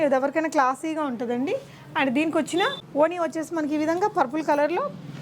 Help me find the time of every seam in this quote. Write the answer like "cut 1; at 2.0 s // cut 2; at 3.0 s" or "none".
cut 1; at 2.8 s

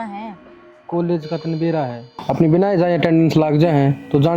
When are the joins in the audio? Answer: none

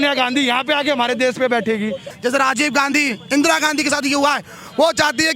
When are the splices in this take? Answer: cut 1; at 2.1 s

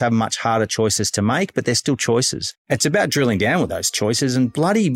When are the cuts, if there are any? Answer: cut 1; at 2.6 s

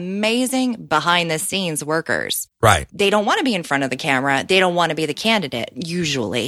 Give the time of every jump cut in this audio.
cut 1; at 2.8 s

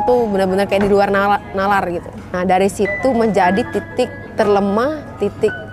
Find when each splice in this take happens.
cut 1; at 2.3 s // cut 2; at 4.2 s

